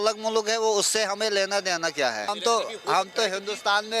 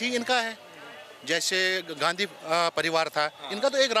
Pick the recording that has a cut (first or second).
first